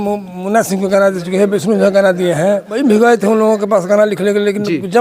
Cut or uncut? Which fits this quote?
cut